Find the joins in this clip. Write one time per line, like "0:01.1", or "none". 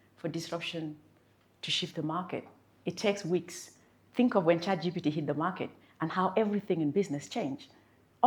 none